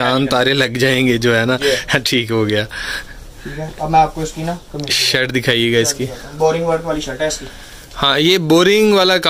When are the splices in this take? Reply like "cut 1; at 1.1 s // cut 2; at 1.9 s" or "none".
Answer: none